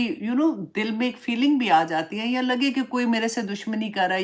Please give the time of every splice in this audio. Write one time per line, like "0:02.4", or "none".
none